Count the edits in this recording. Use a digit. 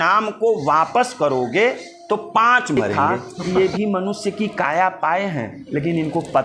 1